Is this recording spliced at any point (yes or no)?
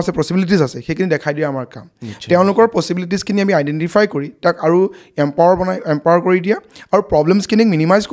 no